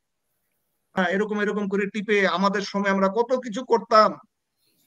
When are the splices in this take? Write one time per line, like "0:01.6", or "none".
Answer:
0:01.0